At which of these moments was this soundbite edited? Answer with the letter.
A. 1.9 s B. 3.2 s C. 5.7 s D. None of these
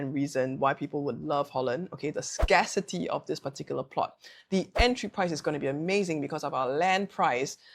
D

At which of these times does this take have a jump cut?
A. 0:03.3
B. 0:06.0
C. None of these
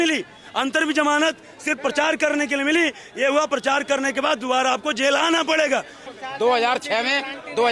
B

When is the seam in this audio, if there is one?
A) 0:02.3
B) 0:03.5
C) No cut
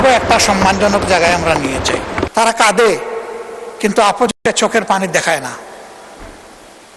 A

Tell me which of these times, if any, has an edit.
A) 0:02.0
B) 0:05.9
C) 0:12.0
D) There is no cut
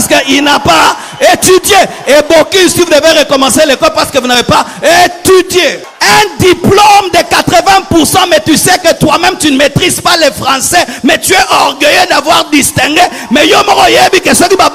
B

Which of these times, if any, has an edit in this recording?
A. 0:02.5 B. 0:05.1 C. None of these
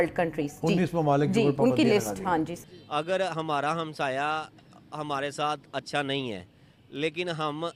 A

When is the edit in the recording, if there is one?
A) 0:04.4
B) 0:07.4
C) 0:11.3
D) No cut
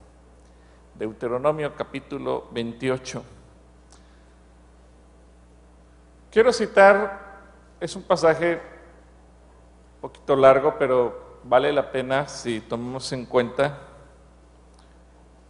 C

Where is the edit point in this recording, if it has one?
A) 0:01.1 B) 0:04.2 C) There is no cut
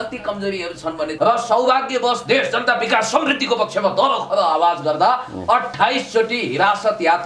A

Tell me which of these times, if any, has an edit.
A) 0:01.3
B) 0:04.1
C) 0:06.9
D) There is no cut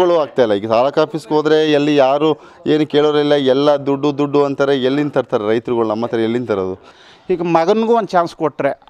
C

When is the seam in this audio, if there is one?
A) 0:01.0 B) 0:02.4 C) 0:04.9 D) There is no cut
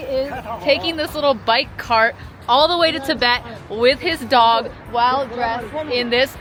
D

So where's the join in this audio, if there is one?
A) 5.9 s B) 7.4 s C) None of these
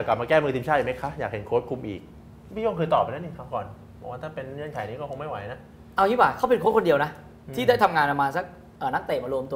C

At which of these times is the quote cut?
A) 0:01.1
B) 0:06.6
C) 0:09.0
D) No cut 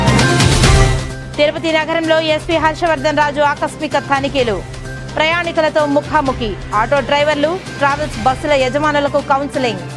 D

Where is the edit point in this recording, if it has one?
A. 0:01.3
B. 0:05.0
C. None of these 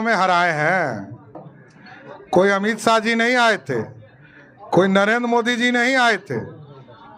A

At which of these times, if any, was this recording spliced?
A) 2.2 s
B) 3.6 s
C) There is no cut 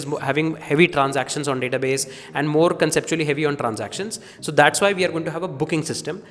C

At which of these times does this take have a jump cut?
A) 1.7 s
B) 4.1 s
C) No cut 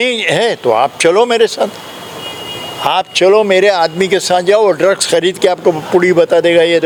C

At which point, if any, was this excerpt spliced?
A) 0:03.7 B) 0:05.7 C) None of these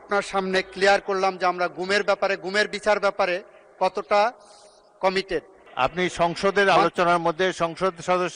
B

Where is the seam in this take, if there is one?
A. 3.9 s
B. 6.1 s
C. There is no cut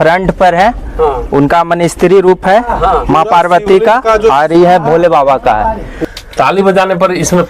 B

